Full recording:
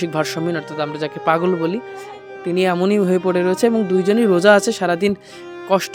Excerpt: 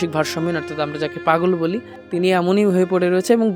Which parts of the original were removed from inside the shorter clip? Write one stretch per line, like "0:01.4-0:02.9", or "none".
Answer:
0:01.9-0:02.3